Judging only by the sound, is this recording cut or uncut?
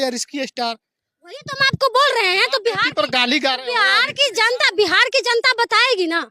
uncut